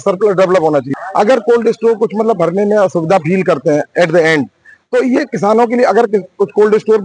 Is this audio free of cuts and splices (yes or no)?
no